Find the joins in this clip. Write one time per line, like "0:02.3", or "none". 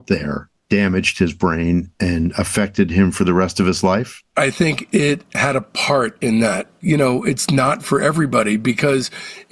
0:06.8